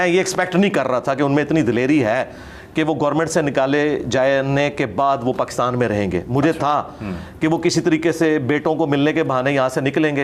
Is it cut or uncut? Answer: uncut